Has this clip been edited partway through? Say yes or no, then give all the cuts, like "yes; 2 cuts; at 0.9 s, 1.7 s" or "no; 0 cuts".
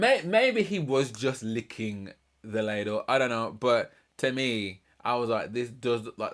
no; 0 cuts